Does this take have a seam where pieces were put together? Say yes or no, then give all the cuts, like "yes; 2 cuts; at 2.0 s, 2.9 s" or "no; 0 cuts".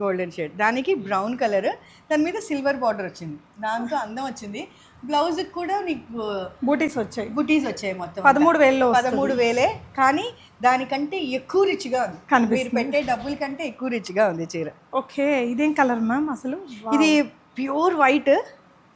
no; 0 cuts